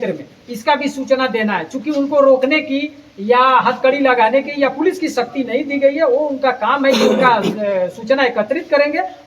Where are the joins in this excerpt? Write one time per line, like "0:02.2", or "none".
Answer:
none